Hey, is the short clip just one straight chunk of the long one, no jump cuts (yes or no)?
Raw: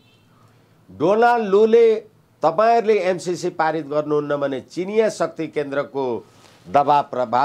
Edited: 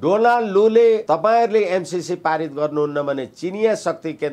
no